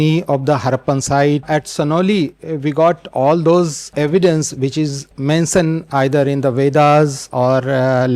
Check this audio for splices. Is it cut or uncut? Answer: cut